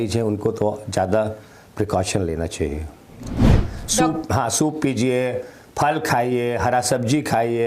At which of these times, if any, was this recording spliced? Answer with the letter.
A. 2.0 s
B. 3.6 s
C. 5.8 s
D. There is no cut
B